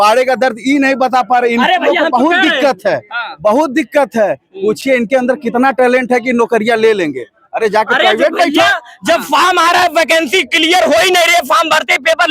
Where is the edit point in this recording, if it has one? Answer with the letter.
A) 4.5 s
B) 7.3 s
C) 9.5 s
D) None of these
D